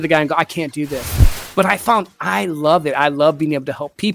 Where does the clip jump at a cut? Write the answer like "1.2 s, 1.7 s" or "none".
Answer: 1.3 s